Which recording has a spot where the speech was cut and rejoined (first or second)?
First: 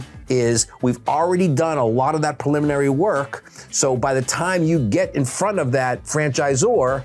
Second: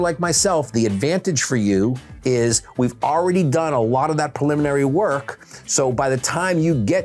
first